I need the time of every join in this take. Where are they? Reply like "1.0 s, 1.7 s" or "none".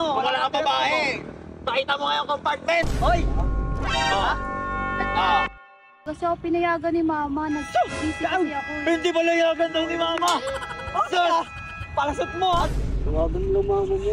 5.9 s, 12.7 s